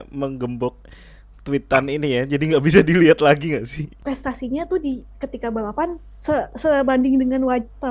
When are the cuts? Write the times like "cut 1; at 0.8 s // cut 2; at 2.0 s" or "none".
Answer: cut 1; at 3.9 s // cut 2; at 6.1 s

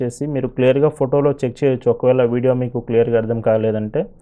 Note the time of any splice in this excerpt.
none

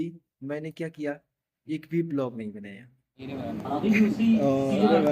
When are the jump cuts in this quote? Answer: cut 1; at 3.3 s

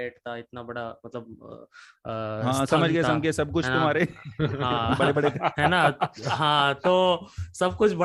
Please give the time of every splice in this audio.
none

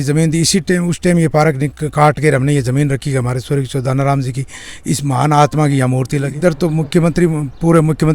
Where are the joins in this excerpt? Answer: cut 1; at 6.2 s

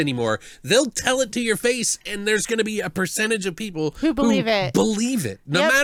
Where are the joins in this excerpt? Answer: none

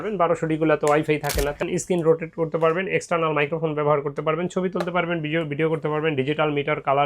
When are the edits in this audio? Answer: cut 1; at 1.6 s

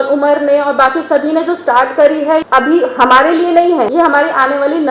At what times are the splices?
cut 1; at 2.5 s // cut 2; at 3.9 s

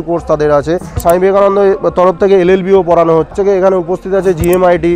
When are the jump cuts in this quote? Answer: cut 1; at 1.0 s // cut 2; at 3.3 s

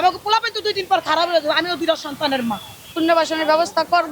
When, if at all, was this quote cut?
cut 1; at 2.9 s

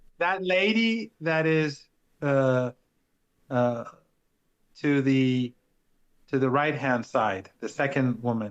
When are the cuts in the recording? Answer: none

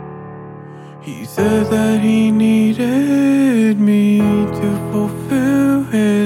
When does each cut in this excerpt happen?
cut 1; at 1.3 s

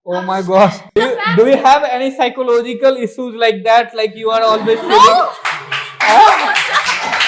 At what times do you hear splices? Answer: cut 1; at 0.9 s

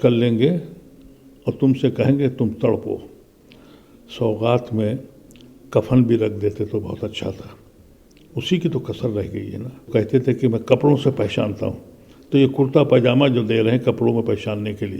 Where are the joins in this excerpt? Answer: cut 1; at 9.8 s

